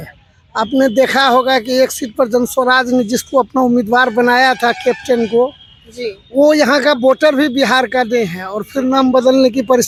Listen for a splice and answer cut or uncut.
uncut